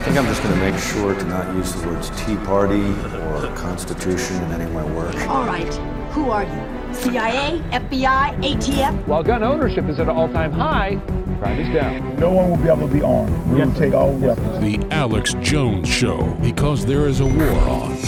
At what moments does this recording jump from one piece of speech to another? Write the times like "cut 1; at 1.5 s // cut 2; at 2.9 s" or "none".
none